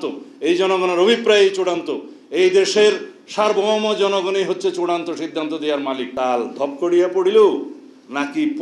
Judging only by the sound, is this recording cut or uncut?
cut